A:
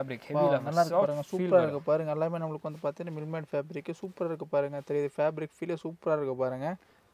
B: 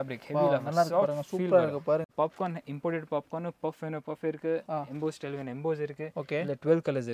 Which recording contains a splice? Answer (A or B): B